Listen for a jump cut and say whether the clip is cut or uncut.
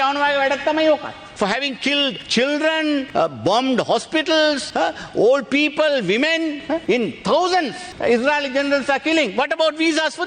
cut